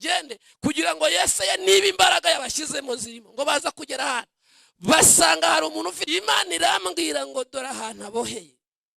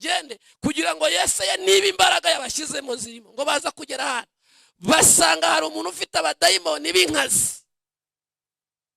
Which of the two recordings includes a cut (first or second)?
first